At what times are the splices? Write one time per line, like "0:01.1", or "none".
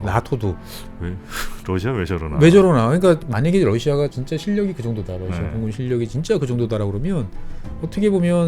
0:03.2
0:04.2